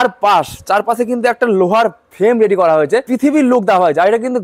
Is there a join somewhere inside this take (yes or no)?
yes